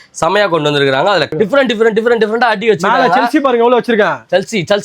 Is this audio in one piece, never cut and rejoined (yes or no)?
no